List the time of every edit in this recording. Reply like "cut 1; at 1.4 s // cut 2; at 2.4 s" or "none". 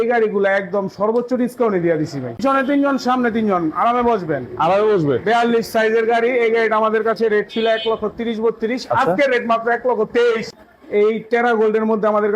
cut 1; at 2.4 s // cut 2; at 10.5 s